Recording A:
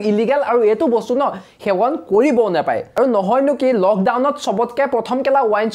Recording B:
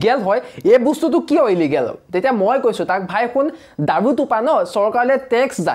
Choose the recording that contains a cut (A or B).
A